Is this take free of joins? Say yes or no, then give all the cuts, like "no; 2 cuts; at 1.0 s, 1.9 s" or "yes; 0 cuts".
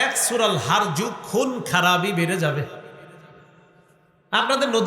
yes; 0 cuts